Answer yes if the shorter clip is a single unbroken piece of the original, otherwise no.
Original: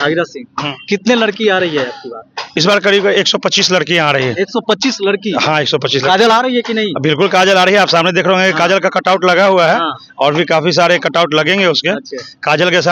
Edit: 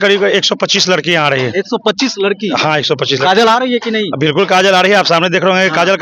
yes